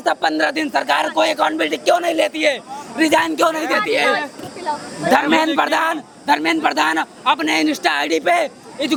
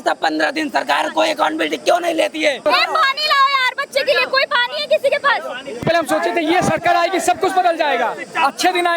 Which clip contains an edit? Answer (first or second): second